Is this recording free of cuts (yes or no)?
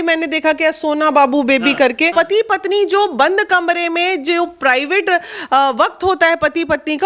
no